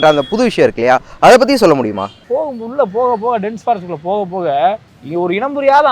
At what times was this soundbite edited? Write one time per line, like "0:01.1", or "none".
0:02.2
0:04.9